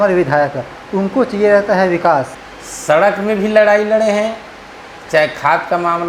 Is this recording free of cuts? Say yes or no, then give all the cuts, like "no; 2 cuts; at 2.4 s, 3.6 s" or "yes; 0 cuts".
no; 1 cut; at 2.4 s